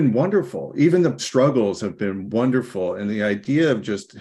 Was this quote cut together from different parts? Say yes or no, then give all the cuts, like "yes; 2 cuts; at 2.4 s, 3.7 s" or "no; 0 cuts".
no; 0 cuts